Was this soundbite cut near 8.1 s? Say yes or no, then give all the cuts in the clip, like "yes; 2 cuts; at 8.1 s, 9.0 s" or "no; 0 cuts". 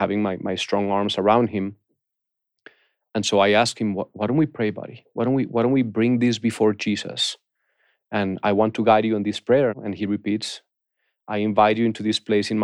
no; 1 cut; at 9.8 s